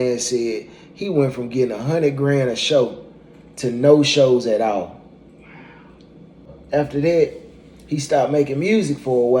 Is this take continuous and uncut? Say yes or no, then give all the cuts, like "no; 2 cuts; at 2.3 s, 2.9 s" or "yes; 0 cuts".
no; 1 cut; at 6.6 s